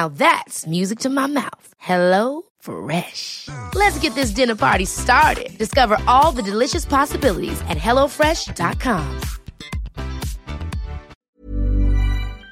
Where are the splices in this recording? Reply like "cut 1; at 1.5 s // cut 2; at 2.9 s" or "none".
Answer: cut 1; at 11.2 s